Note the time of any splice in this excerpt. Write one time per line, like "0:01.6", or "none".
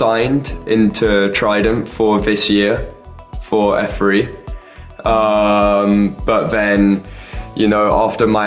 none